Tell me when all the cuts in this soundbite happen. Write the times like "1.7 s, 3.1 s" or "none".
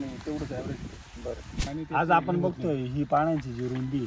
1.7 s